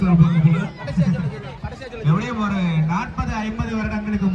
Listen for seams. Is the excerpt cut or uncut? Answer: uncut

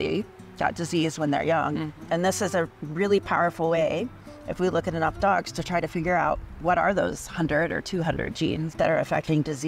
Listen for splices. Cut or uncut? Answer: cut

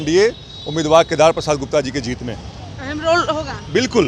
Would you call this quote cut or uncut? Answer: uncut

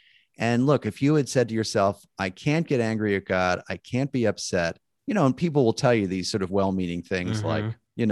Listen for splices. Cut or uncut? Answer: uncut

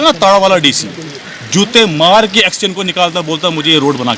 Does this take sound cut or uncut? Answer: uncut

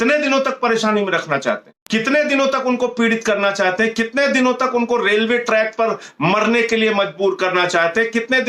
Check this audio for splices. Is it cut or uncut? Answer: cut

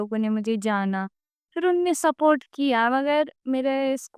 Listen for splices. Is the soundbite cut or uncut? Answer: uncut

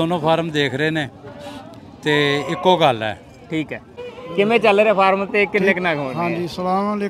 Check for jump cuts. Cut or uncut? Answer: cut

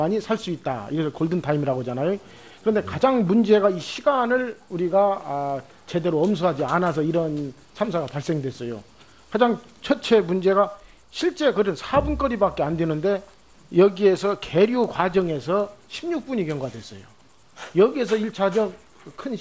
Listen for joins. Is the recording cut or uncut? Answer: uncut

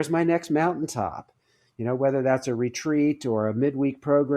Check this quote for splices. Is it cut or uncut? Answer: uncut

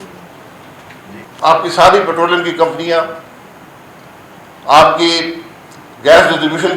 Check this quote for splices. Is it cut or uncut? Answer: cut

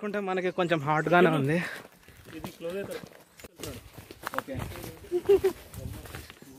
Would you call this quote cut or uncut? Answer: cut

